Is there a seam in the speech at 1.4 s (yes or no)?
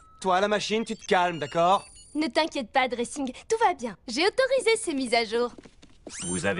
yes